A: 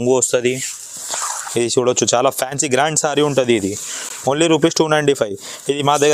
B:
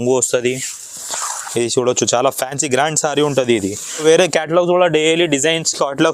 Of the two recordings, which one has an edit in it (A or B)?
B